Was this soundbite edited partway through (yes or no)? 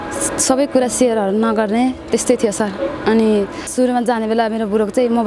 yes